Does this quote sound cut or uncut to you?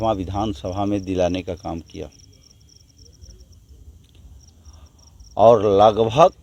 uncut